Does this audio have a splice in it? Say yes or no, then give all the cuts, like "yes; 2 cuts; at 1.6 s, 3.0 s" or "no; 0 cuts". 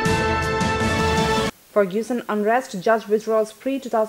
yes; 1 cut; at 1.3 s